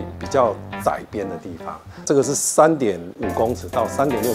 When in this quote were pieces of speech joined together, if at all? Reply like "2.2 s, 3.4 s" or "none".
2.1 s, 3.1 s